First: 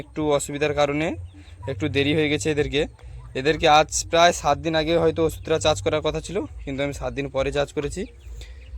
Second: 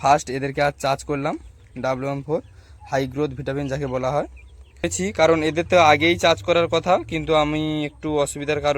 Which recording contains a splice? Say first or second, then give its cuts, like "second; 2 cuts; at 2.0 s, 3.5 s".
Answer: second; 1 cut; at 4.9 s